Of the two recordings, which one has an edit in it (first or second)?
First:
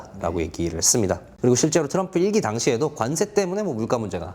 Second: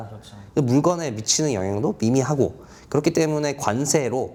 first